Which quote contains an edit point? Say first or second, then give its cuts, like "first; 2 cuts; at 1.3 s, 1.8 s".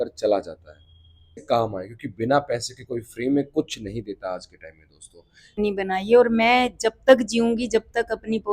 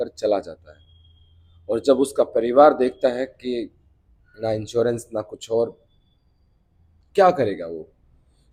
first; 2 cuts; at 1.4 s, 5.6 s